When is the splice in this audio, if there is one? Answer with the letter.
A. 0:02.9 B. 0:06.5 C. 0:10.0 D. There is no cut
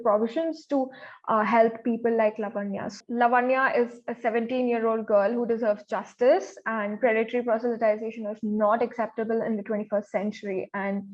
A